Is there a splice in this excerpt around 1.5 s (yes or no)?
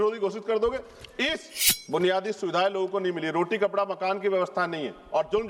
yes